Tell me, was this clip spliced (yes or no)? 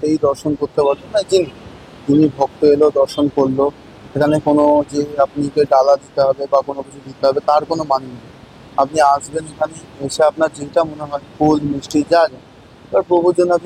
no